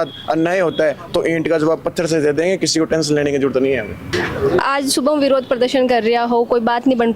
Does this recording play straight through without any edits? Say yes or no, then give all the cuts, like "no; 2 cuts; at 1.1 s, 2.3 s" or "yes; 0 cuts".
yes; 0 cuts